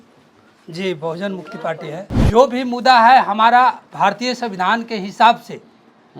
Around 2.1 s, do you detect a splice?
yes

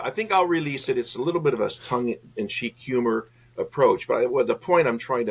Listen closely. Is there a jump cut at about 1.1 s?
no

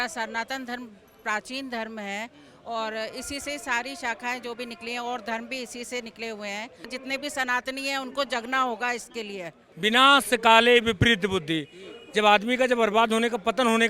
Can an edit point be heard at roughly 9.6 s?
yes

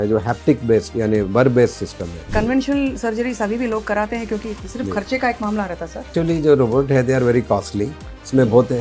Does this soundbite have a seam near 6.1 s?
yes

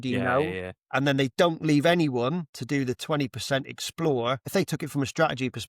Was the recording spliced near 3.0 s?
no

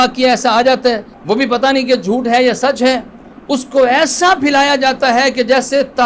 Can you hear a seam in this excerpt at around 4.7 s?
no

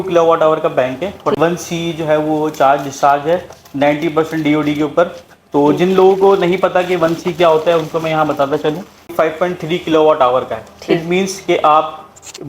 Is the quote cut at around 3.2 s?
no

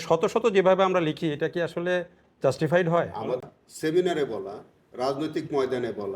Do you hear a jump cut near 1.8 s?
no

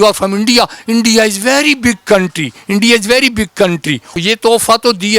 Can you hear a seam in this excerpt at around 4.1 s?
yes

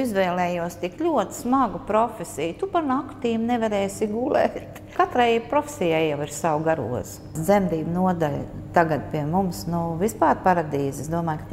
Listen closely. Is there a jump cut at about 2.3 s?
no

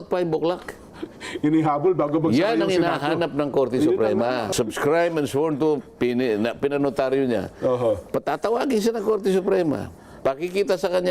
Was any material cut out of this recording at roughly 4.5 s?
yes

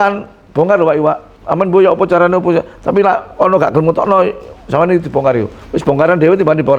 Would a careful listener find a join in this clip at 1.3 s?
yes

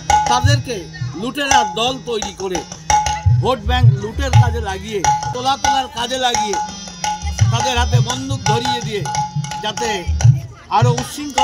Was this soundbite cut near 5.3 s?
yes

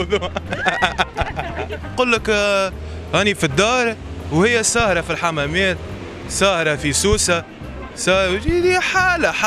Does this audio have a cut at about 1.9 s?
yes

